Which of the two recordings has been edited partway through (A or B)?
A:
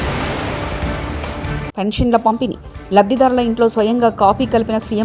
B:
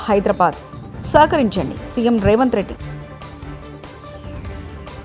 A